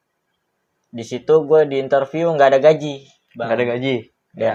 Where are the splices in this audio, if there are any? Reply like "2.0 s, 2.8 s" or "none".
none